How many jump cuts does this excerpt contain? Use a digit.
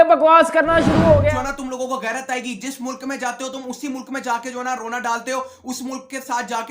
1